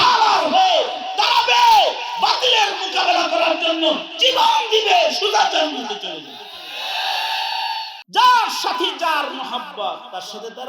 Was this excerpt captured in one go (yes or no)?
no